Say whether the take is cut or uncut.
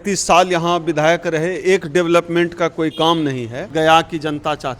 cut